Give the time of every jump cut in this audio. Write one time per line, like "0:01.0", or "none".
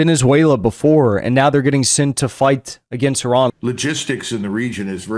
0:03.5